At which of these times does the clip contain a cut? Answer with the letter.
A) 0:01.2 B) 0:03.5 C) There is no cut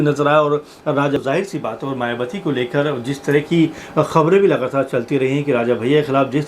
A